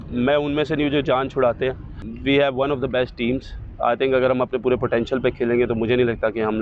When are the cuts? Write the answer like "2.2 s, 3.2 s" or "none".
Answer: 2.0 s

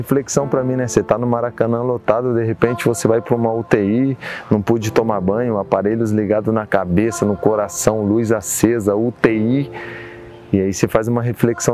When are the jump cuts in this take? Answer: none

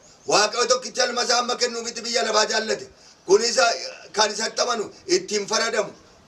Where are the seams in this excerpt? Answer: none

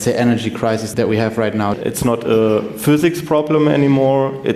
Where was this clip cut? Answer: 0.9 s, 1.8 s

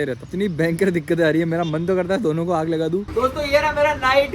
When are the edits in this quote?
3.1 s

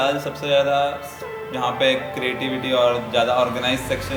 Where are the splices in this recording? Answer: none

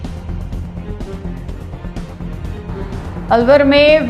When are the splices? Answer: 1.3 s

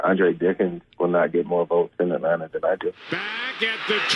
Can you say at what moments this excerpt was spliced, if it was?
3.0 s

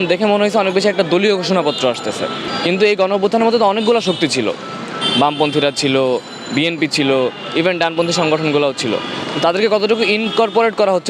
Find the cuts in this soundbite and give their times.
2.4 s

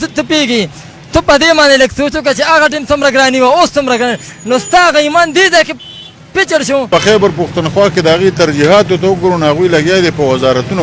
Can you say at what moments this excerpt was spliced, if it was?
6.9 s

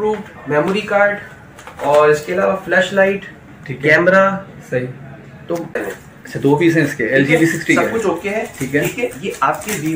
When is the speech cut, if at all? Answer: 5.8 s

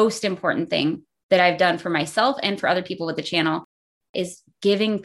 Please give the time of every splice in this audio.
4.1 s

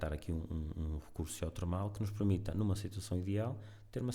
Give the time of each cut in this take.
none

